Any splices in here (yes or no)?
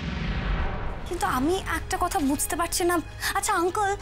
yes